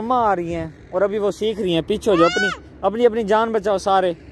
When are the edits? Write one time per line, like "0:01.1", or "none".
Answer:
none